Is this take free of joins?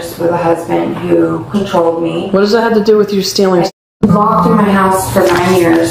yes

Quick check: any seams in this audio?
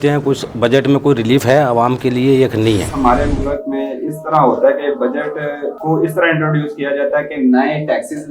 yes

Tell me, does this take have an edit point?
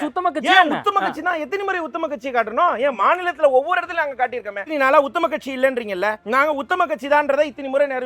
yes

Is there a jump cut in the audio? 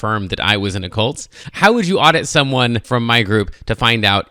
yes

